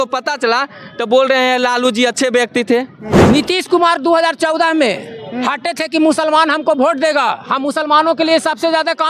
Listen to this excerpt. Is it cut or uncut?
cut